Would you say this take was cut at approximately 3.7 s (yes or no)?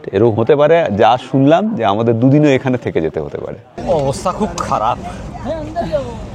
yes